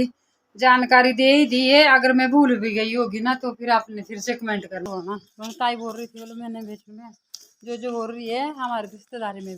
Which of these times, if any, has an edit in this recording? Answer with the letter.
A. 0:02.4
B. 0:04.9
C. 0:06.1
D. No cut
B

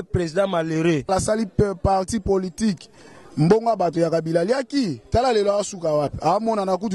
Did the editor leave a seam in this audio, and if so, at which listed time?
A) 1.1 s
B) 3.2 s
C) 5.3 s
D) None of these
A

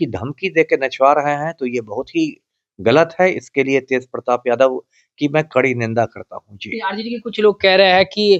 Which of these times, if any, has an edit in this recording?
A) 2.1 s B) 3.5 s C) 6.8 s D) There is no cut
D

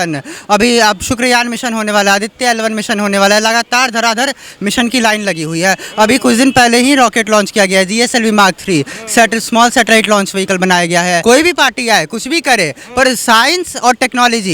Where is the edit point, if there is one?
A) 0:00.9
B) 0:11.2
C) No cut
B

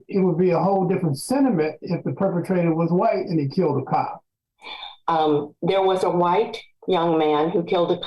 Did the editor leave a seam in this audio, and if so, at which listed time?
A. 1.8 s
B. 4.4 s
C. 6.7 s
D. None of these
B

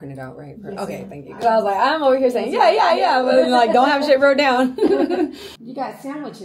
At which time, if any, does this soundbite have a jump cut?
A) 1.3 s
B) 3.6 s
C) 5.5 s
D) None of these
C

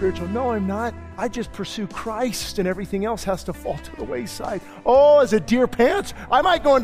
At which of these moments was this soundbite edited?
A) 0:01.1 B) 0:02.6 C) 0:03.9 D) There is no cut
A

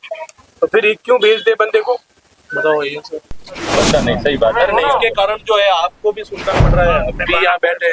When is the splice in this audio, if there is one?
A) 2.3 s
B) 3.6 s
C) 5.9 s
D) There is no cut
B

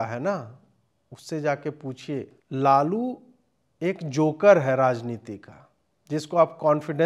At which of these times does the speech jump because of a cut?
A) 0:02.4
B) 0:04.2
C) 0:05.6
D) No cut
A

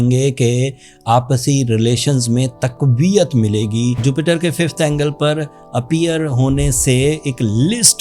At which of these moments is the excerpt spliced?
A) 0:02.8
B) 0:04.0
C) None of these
B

